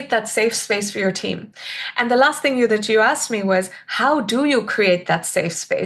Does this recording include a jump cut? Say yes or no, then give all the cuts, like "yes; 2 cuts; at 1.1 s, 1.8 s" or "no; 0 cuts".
no; 0 cuts